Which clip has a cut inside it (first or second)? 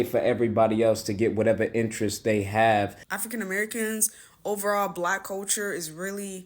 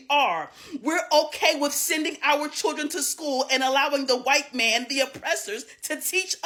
first